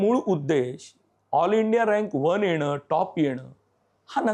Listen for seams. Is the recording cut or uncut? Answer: uncut